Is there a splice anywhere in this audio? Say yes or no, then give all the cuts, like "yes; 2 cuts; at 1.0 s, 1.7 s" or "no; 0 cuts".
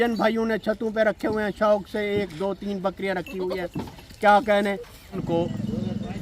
yes; 1 cut; at 5.2 s